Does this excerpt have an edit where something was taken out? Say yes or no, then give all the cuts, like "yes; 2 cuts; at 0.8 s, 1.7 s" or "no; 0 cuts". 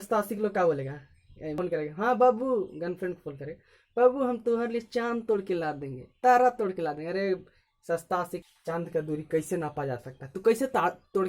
yes; 2 cuts; at 1.5 s, 8.4 s